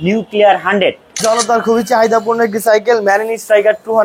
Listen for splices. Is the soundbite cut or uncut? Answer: cut